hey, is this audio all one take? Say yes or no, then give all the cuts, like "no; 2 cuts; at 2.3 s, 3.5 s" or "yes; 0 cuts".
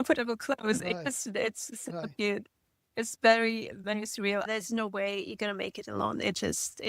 no; 1 cut; at 4.5 s